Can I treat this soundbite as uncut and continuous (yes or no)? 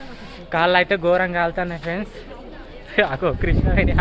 yes